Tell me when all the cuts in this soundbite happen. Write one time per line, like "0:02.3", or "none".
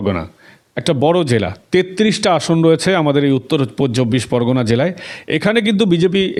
none